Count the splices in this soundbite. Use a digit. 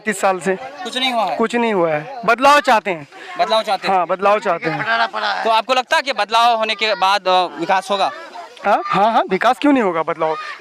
0